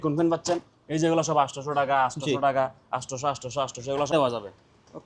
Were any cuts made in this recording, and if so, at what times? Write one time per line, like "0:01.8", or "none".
0:04.1